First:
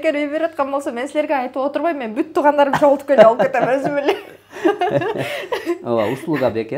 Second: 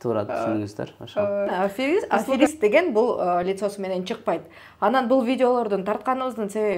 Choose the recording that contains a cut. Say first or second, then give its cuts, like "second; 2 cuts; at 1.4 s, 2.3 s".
second; 1 cut; at 1.5 s